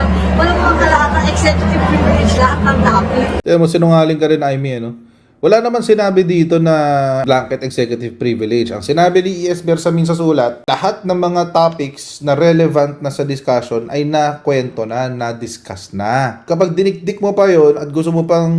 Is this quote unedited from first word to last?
no; 2 cuts; at 3.4 s, 16.4 s

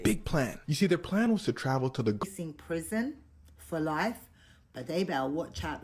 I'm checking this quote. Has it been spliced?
yes; 1 cut; at 2.2 s

